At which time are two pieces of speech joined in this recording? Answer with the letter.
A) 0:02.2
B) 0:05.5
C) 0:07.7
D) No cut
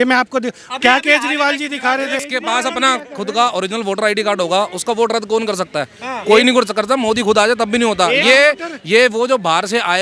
A